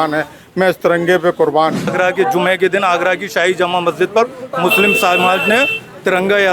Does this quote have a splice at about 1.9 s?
yes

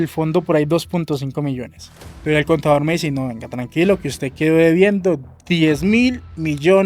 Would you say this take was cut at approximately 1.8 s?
yes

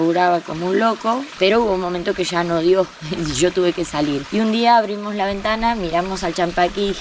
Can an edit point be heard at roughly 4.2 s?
yes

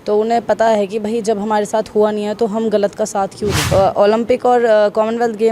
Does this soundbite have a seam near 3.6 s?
yes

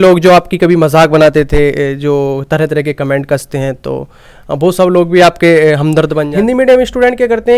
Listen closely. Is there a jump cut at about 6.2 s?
yes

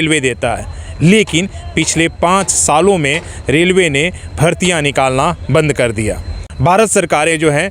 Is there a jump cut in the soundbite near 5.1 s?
no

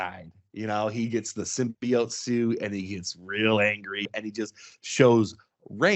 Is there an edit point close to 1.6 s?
no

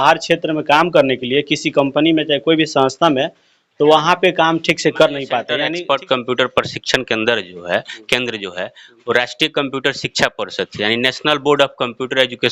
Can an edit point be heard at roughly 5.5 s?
yes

